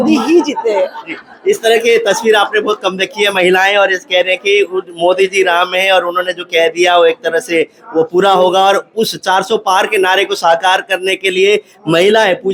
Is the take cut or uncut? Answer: uncut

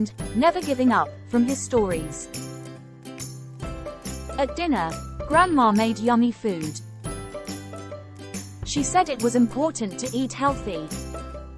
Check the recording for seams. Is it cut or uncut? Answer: cut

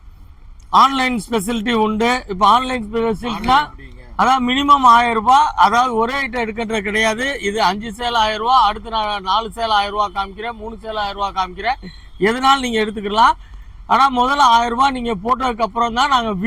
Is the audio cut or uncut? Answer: uncut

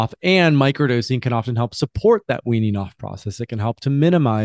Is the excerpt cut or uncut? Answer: uncut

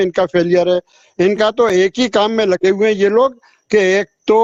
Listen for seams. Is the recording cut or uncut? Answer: uncut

